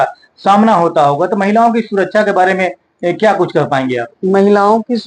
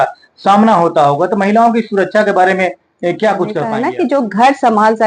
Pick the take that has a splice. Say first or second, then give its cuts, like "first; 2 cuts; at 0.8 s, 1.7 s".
second; 1 cut; at 3.8 s